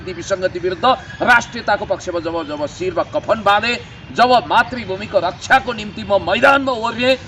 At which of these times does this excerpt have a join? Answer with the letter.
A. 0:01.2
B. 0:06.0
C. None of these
C